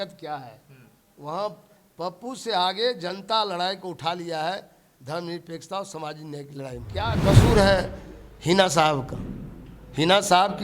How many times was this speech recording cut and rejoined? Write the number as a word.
one